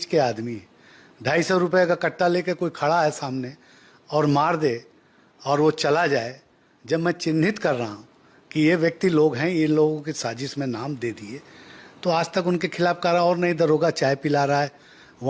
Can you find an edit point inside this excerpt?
no; 0 cuts

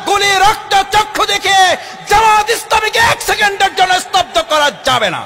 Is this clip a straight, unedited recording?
yes; 0 cuts

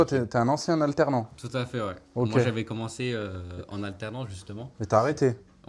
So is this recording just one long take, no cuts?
yes; 0 cuts

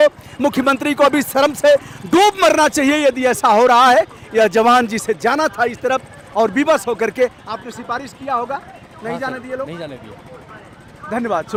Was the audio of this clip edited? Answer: no; 0 cuts

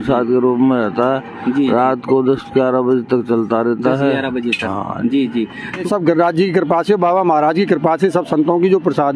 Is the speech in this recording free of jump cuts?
no; 1 cut; at 5.8 s

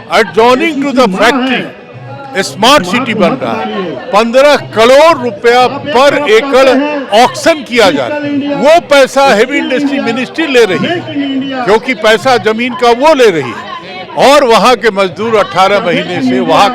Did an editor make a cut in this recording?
no; 0 cuts

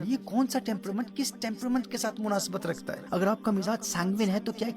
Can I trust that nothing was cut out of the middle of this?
no; 1 cut; at 2.9 s

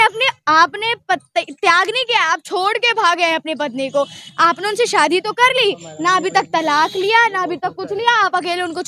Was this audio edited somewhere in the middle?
no; 0 cuts

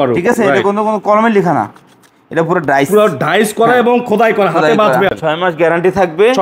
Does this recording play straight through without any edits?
no; 1 cut; at 5.1 s

